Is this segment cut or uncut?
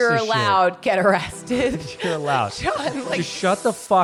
uncut